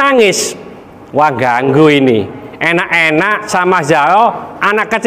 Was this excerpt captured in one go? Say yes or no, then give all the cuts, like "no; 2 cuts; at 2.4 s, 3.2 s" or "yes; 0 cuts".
no; 1 cut; at 3.5 s